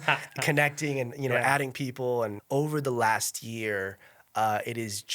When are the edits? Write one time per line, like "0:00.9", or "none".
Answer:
0:02.4